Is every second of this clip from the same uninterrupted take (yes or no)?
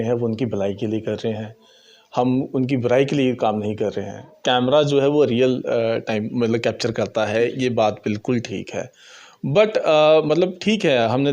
no